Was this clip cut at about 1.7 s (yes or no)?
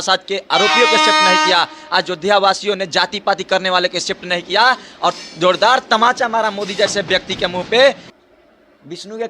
no